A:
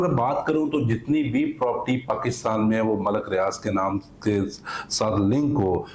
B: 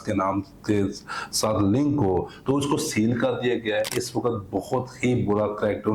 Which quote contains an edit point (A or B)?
B